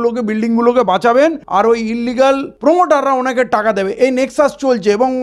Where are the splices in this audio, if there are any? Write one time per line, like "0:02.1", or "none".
0:01.4
0:02.5